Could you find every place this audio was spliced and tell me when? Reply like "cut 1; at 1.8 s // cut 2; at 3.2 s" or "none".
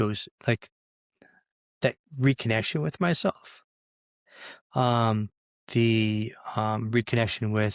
none